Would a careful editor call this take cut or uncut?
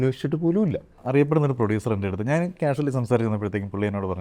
cut